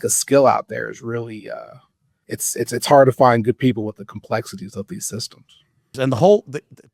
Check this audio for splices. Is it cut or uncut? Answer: cut